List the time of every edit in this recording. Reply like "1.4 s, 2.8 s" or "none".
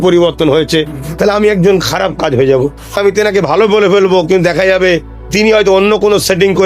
3.0 s